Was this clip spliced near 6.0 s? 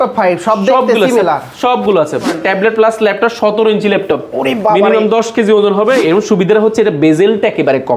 yes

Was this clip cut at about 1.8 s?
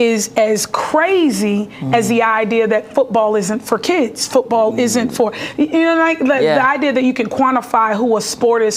no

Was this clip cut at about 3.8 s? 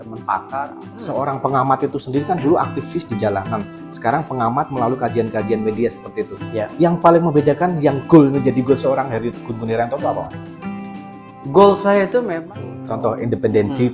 no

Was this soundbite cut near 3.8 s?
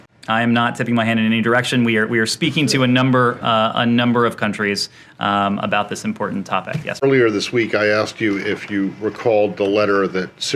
no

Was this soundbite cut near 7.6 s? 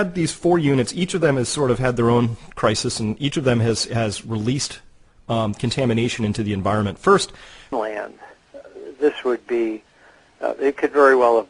no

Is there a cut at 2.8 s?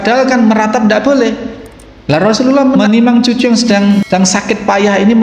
yes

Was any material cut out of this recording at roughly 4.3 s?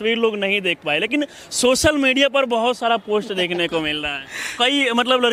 no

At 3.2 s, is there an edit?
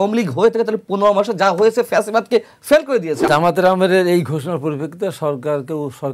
yes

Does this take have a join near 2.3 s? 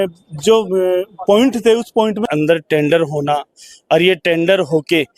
yes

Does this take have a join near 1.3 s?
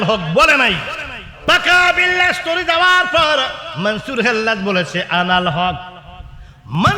yes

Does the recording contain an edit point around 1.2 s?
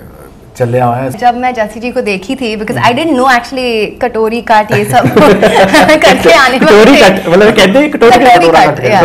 yes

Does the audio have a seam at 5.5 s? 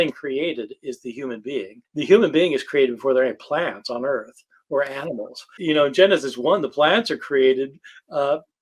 yes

